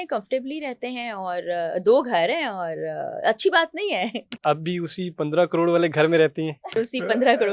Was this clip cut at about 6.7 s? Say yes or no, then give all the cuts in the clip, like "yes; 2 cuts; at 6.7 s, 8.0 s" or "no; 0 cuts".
yes; 2 cuts; at 4.3 s, 6.7 s